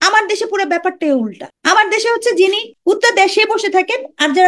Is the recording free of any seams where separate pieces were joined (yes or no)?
no